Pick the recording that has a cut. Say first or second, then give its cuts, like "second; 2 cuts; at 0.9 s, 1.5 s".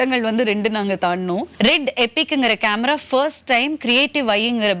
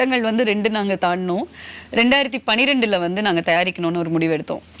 first; 1 cut; at 1.5 s